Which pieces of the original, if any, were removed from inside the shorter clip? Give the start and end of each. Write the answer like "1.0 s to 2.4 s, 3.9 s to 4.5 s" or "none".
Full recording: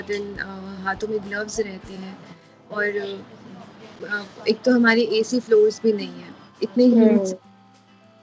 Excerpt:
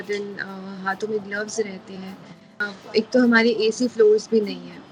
2.5 s to 4.0 s